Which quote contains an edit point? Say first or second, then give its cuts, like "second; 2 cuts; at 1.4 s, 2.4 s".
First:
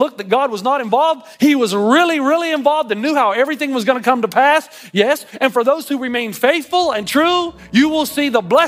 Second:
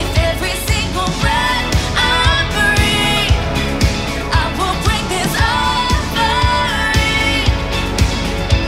first; 3 cuts; at 1.3 s, 5.3 s, 7.6 s